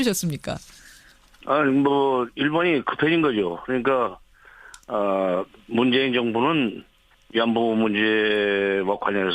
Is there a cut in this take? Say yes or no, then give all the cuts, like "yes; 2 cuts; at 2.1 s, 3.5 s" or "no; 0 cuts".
yes; 1 cut; at 2.1 s